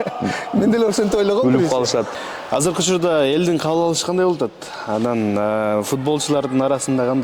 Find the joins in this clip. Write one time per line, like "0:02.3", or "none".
0:02.1